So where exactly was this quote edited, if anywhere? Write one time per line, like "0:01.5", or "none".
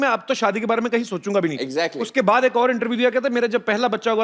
none